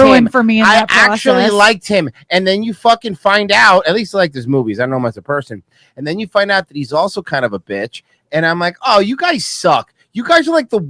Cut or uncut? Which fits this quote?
uncut